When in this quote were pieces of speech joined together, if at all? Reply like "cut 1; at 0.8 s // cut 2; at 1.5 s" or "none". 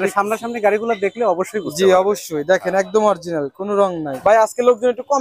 cut 1; at 4.2 s